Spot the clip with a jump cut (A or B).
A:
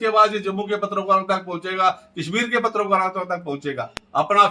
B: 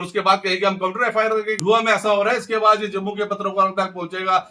B